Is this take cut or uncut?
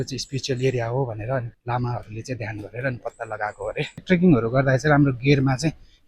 cut